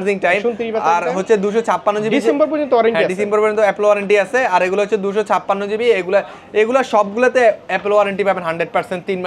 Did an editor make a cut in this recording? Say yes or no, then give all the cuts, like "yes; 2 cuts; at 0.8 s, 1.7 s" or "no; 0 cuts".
no; 0 cuts